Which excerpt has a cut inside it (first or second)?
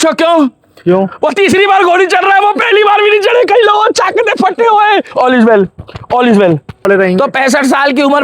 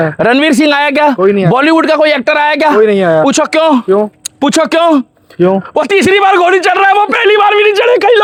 first